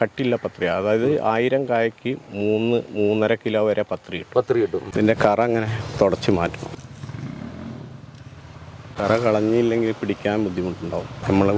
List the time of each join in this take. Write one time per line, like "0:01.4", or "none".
0:04.9